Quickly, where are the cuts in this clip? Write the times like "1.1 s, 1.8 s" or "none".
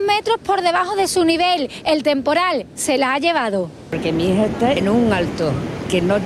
none